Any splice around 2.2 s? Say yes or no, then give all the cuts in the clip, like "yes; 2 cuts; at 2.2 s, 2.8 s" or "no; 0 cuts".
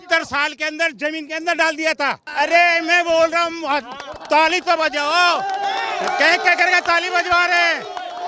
yes; 1 cut; at 2.2 s